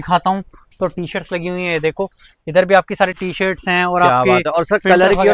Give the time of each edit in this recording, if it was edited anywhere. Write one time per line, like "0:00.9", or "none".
none